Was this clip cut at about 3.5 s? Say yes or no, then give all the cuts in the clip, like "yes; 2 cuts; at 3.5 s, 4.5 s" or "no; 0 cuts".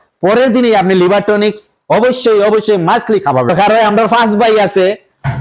yes; 1 cut; at 3.5 s